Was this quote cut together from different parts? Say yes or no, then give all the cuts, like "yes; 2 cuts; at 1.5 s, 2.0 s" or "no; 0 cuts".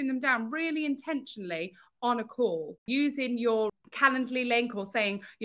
yes; 2 cuts; at 2.8 s, 3.7 s